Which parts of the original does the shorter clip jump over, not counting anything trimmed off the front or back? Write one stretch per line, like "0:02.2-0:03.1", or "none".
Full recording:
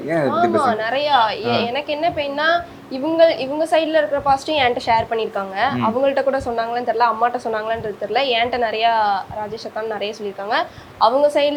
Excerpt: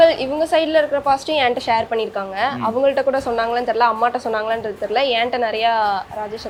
none